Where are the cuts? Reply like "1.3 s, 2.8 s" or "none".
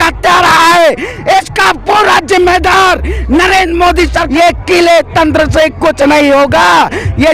4.2 s